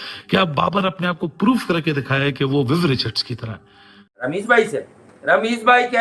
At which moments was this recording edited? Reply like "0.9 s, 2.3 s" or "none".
4.1 s